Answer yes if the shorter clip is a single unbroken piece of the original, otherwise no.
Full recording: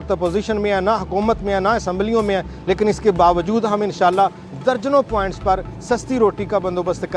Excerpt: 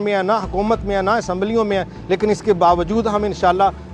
yes